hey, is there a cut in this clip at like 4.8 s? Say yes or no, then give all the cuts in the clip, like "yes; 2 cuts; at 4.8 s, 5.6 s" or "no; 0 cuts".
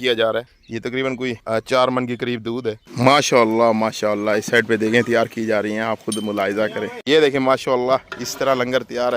no; 3 cuts; at 1.1 s, 2.8 s, 6.9 s